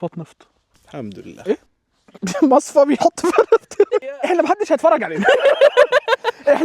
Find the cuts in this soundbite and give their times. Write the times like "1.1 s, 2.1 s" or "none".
4.1 s